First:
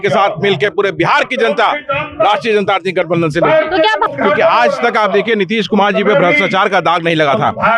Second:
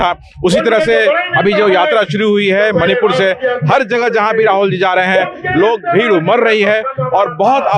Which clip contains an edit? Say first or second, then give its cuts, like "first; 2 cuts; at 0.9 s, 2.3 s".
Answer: first; 1 cut; at 4.1 s